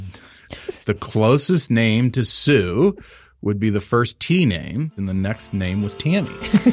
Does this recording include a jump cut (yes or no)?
yes